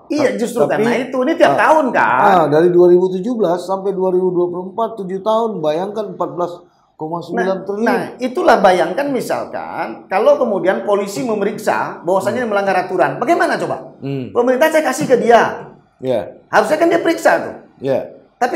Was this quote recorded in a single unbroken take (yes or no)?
yes